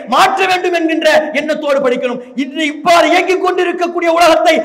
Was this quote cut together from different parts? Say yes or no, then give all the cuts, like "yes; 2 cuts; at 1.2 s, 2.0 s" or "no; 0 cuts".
no; 0 cuts